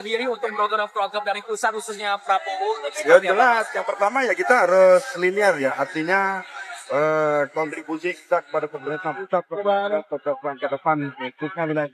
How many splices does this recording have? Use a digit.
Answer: 0